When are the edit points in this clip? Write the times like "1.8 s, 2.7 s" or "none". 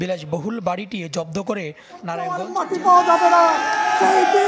2.4 s